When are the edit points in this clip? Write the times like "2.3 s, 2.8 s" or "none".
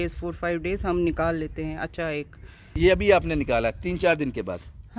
2.7 s